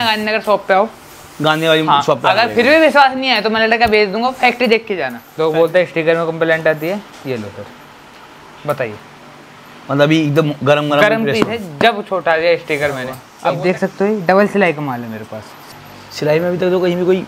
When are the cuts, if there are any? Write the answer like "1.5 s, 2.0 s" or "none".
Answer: 5.2 s, 13.2 s, 15.6 s